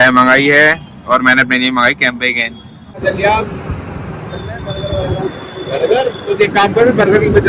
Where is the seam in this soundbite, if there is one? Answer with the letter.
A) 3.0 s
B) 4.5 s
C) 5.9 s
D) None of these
A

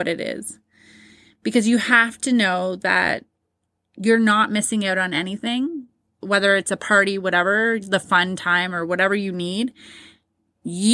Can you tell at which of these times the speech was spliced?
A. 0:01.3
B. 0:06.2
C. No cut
B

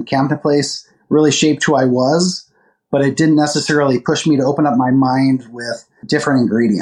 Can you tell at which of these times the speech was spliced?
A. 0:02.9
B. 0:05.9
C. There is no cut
B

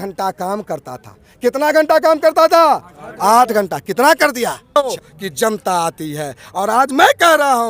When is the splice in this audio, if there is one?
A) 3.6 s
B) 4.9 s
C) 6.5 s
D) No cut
B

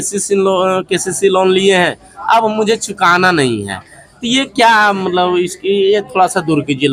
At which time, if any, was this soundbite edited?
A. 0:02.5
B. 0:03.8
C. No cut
C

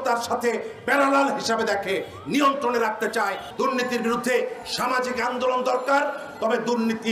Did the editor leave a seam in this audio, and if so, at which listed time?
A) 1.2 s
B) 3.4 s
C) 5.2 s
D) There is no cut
B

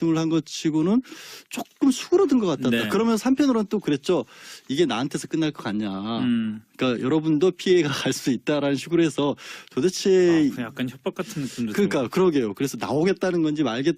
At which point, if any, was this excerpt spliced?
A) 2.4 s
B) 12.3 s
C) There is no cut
B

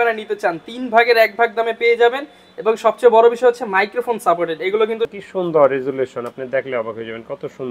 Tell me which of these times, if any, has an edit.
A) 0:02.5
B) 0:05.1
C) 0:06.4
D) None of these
B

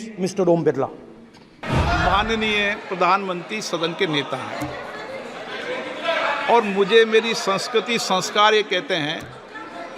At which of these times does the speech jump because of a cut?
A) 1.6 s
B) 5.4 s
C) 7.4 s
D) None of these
A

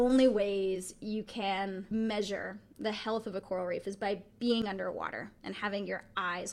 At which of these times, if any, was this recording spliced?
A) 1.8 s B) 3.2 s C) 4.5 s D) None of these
A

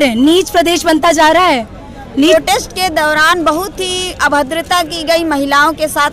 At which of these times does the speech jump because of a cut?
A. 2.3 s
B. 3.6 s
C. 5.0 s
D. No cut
A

